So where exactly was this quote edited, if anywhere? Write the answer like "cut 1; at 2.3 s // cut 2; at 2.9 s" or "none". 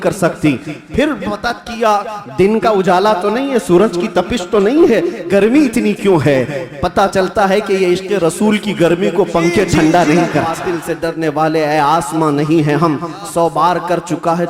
cut 1; at 10.6 s